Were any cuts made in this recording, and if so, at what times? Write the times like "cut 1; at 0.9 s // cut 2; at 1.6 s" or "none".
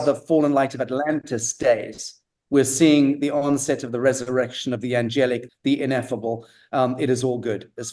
cut 1; at 5.5 s